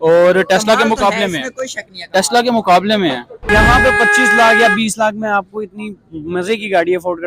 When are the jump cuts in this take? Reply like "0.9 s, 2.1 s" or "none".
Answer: 3.3 s